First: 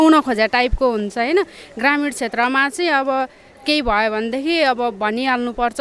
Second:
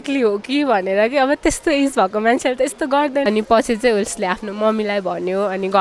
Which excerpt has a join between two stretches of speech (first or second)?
second